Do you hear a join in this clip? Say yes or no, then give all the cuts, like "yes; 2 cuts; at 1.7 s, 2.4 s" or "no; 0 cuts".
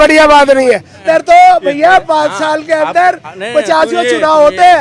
yes; 1 cut; at 1.0 s